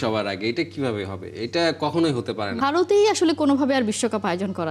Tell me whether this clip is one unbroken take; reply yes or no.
no